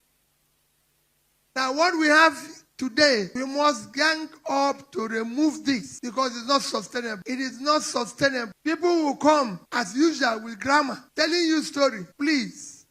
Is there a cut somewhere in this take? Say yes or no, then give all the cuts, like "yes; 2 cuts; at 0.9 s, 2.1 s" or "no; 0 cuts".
yes; 7 cuts; at 3.3 s, 6.0 s, 7.2 s, 8.5 s, 9.6 s, 11.0 s, 12.1 s